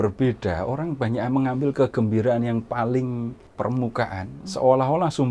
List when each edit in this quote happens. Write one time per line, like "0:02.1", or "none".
0:03.4
0:04.4